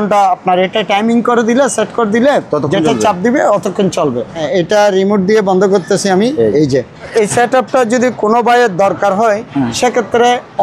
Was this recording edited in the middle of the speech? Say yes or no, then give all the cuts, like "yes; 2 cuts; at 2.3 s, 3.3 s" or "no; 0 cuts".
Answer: yes; 2 cuts; at 4.4 s, 7.1 s